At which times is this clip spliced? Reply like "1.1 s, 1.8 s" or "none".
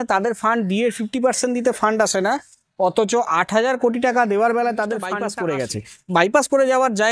5.2 s